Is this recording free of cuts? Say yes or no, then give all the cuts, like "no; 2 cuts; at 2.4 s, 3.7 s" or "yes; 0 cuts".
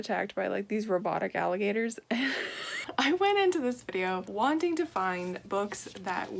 no; 1 cut; at 2.8 s